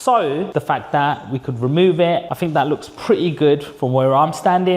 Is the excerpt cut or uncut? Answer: cut